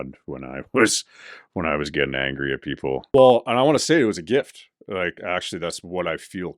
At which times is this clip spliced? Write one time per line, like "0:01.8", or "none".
0:03.0